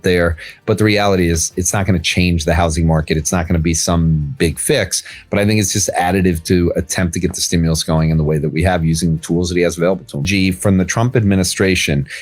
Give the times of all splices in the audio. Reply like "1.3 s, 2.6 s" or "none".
10.3 s